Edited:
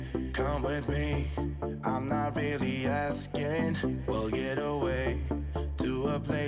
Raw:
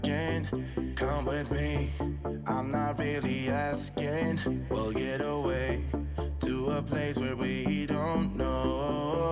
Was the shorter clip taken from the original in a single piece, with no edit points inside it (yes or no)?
yes